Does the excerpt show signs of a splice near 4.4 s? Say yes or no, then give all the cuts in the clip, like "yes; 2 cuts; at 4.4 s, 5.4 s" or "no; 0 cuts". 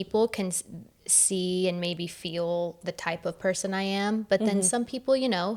no; 0 cuts